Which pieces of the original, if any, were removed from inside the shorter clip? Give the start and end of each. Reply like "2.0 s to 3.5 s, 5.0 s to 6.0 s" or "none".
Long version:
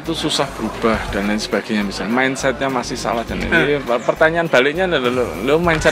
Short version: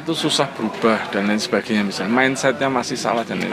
none